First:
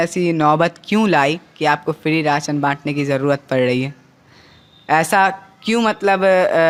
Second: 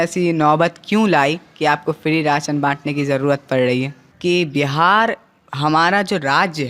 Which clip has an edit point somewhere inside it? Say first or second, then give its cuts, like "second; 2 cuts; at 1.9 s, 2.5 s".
second; 1 cut; at 4.0 s